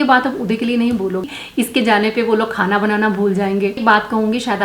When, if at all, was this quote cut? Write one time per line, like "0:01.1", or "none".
0:01.2
0:03.8